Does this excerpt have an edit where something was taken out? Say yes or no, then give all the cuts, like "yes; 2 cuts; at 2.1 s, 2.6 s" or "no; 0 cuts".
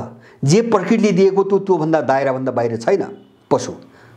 no; 0 cuts